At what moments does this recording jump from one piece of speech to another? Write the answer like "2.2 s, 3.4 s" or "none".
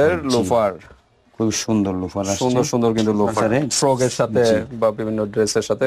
3.2 s